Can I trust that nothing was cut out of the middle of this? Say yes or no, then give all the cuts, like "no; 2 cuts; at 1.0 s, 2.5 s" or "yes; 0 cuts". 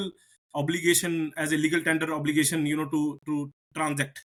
yes; 0 cuts